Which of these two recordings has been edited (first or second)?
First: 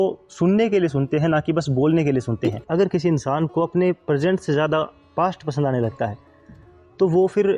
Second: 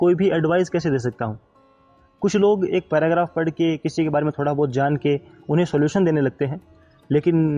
first